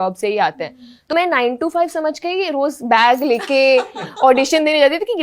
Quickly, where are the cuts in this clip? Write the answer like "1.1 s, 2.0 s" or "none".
1.1 s